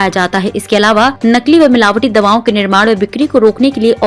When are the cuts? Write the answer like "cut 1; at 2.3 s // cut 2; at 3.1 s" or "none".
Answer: cut 1; at 1.2 s